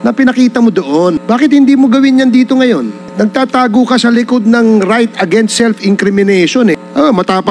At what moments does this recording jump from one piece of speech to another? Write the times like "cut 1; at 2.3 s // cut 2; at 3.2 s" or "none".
cut 1; at 1.2 s // cut 2; at 3.0 s // cut 3; at 6.8 s